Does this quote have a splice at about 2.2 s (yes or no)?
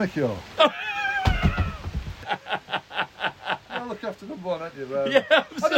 yes